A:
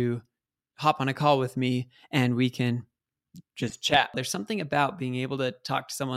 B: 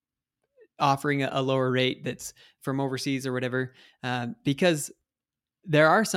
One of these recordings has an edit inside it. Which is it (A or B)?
A